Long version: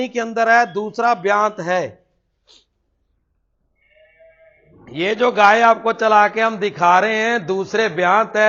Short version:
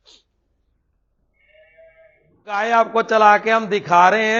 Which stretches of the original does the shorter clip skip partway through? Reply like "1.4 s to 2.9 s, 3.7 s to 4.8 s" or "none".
5.0 s to 5.5 s